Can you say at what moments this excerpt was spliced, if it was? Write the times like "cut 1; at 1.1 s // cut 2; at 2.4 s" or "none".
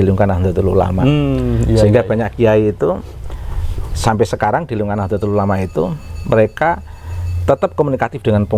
none